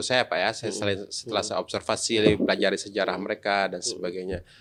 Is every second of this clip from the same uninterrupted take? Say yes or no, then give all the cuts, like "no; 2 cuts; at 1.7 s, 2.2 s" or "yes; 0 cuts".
yes; 0 cuts